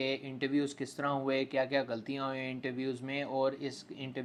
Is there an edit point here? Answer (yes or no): no